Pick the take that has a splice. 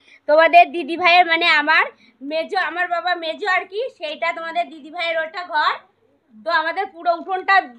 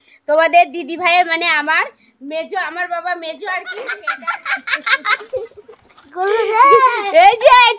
second; 1 cut; at 4.0 s

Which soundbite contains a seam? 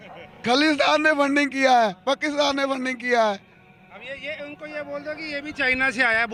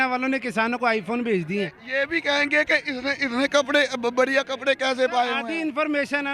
second; 2 cuts; at 1.8 s, 5.4 s

